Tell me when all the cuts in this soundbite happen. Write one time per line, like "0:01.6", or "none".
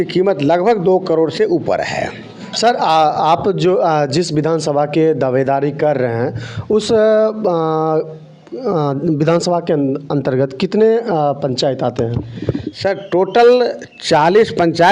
none